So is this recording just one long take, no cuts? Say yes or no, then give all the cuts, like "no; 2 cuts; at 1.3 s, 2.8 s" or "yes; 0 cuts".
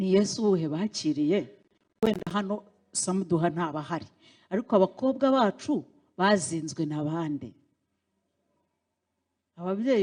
yes; 0 cuts